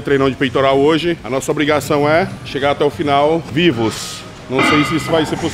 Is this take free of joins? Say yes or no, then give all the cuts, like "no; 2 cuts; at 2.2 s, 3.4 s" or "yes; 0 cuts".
no; 3 cuts; at 1.2 s, 2.4 s, 3.5 s